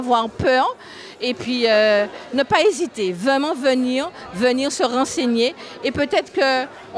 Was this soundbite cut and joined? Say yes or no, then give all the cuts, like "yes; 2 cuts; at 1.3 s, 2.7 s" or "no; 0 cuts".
no; 0 cuts